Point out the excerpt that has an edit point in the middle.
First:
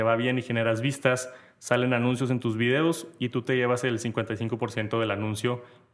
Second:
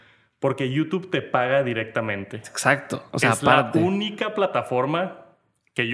second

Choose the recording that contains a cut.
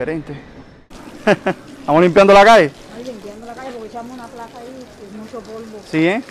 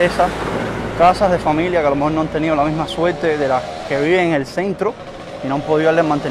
first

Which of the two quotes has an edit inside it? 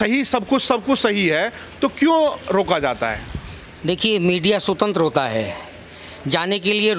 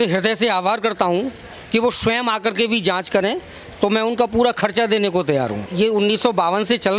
second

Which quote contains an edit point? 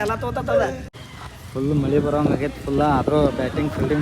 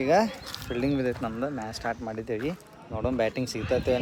first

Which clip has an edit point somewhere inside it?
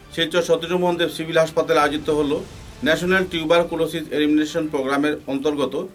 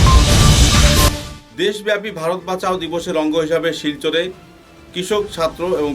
second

